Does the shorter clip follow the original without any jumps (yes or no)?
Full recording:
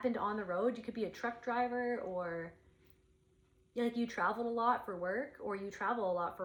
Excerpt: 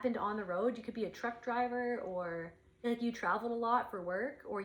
no